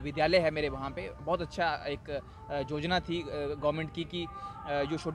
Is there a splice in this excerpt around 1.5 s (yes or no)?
no